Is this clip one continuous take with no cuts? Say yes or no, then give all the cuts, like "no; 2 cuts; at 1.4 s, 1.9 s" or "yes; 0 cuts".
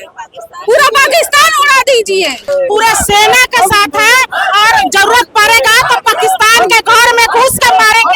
no; 1 cut; at 2.4 s